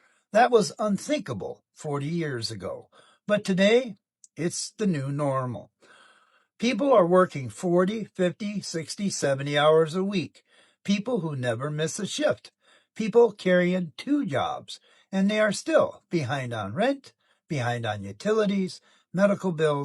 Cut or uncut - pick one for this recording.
uncut